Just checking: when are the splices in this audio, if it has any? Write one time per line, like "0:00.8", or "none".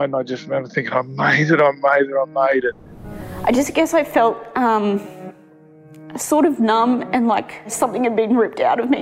0:03.1
0:07.7